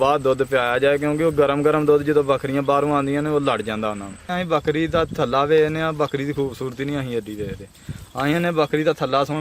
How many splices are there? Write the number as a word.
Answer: one